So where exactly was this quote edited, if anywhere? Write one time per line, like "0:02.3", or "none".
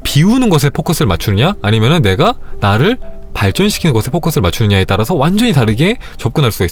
none